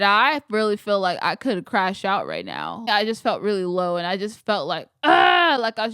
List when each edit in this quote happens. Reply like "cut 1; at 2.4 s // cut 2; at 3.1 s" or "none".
cut 1; at 2.9 s